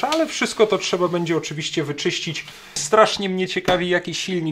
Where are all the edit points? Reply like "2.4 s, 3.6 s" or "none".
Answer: 2.8 s